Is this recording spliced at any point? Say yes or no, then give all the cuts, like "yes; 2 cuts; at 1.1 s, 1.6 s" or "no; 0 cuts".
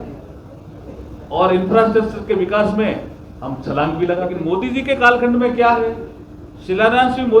yes; 1 cut; at 4.4 s